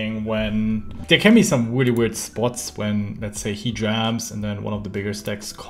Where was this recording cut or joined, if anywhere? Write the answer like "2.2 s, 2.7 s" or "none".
1.0 s

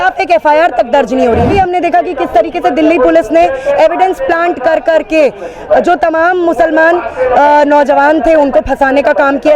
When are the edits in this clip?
1.5 s

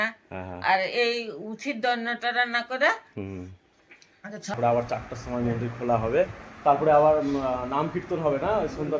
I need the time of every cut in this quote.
4.5 s

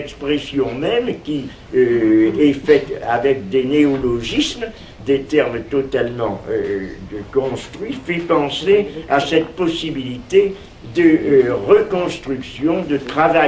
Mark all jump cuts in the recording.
none

